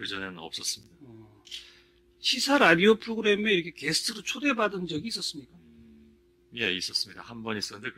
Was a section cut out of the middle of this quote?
no; 0 cuts

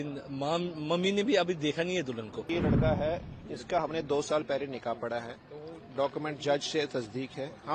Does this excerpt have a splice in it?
yes; 1 cut; at 2.4 s

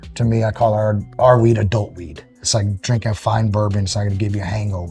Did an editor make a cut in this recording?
no; 0 cuts

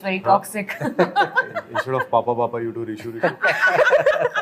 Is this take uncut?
yes; 0 cuts

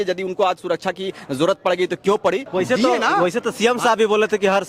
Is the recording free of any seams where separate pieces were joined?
no; 1 cut; at 2.5 s

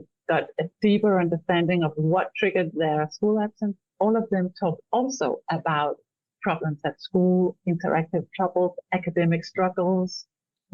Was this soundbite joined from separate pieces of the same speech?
yes; 1 cut; at 3.8 s

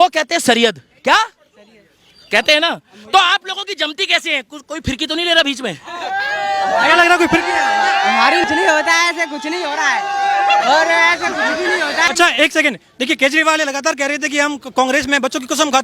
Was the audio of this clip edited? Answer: yes; 2 cuts; at 8.4 s, 12.1 s

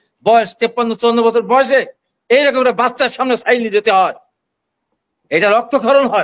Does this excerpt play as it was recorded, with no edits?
yes; 0 cuts

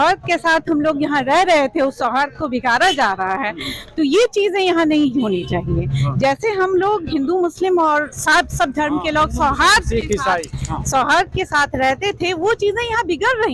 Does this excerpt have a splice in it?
no; 0 cuts

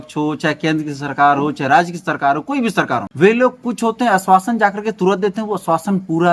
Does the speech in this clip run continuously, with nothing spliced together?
no; 1 cut; at 3.1 s

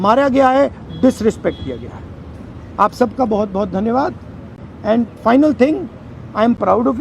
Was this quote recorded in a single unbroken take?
yes; 0 cuts

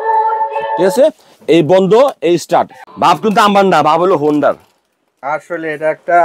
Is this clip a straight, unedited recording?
no; 1 cut; at 2.8 s

